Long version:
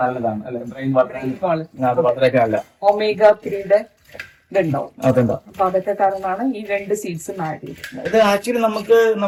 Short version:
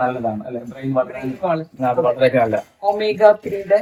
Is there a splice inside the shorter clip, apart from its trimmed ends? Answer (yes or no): no